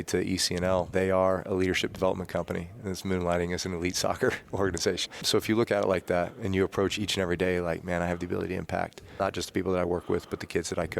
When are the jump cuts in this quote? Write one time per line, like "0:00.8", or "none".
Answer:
0:00.9
0:05.2
0:06.9